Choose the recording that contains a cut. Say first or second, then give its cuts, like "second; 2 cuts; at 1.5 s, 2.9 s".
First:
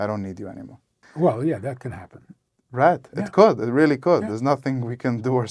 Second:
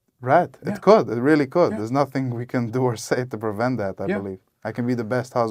first; 1 cut; at 1.0 s